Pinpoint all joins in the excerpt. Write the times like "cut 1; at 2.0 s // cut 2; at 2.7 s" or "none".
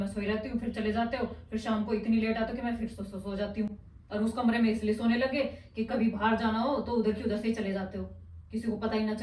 none